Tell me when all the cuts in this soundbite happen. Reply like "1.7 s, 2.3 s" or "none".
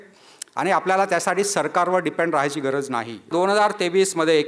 3.3 s